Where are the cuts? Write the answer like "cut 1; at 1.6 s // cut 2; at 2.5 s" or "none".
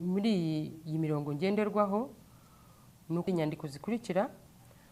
cut 1; at 3.3 s